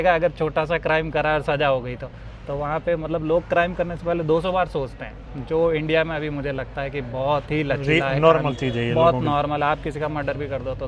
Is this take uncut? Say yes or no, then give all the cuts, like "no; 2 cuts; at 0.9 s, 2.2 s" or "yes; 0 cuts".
yes; 0 cuts